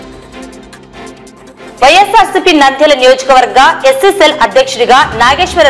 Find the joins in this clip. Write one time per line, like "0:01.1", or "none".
0:01.0